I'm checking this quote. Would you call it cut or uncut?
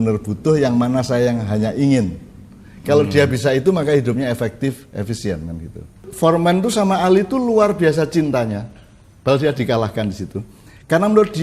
cut